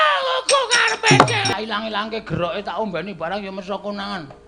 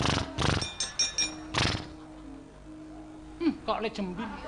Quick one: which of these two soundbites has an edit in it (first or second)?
first